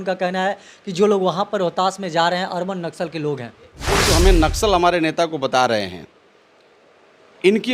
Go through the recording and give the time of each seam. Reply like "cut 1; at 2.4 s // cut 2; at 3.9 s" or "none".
cut 1; at 3.9 s